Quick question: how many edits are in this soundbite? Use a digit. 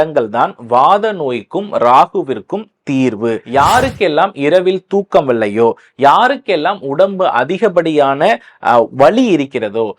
1